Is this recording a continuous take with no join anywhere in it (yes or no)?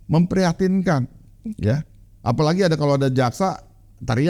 yes